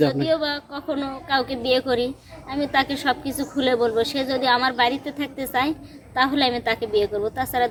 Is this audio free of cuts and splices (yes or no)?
yes